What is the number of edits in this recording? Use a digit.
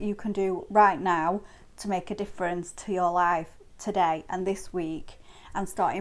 0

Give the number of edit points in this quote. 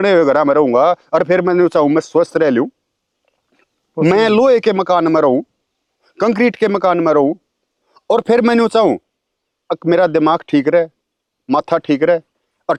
0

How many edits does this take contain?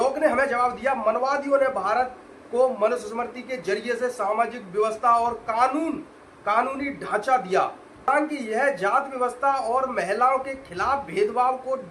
1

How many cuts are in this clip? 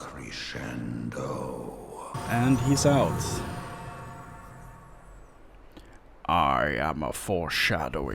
1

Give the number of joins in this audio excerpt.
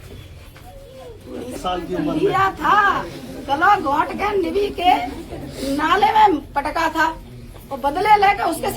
1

